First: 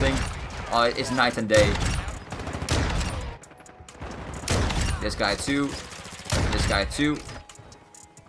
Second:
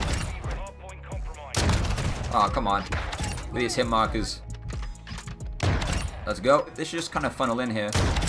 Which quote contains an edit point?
first; 1 cut; at 1.9 s

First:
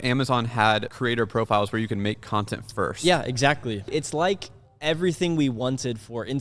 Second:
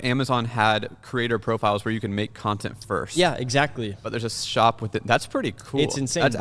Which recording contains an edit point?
first; 2 cuts; at 0.9 s, 3.9 s

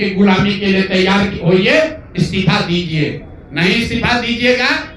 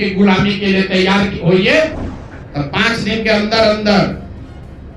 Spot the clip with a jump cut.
second; 1 cut; at 2.1 s

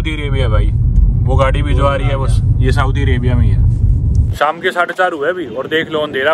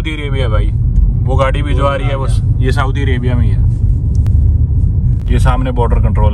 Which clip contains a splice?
first; 1 cut; at 4.3 s

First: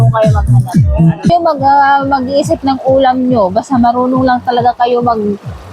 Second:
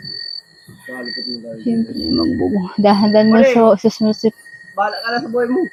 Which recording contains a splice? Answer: first; 1 cut; at 1.3 s

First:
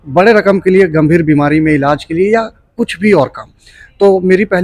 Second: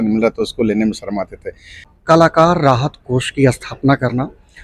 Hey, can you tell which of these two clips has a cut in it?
second; 1 cut; at 1.9 s

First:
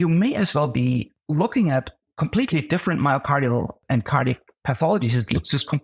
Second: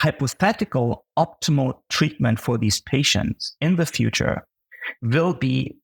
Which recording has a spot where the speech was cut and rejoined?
first; 3 cuts; at 1.2 s, 2.0 s, 3.8 s

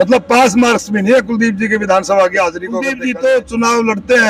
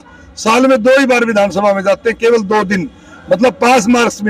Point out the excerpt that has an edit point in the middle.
first; 1 cut; at 2.9 s

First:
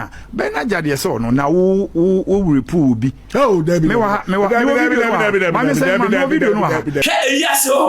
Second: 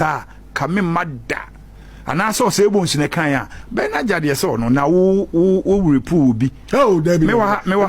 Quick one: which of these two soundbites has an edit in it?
first; 1 cut; at 7.0 s

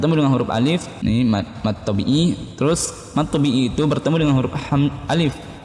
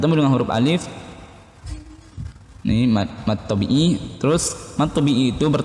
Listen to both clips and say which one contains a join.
first; 1 cut; at 0.9 s

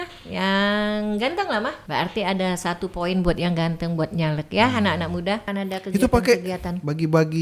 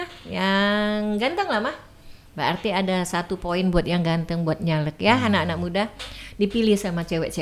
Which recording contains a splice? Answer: first; 2 cuts; at 1.8 s, 5.5 s

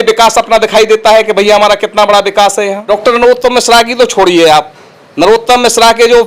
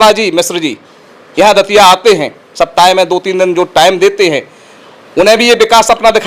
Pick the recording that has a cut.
first; 1 cut; at 2.8 s

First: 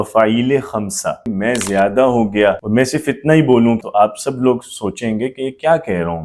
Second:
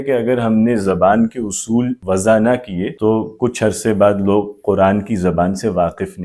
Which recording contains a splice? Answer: first; 3 cuts; at 1.3 s, 2.6 s, 3.8 s

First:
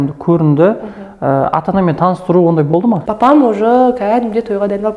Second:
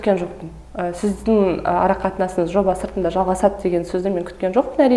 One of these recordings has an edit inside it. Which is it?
first; 1 cut; at 3.1 s

